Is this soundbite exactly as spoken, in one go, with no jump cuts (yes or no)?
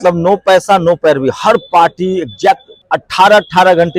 no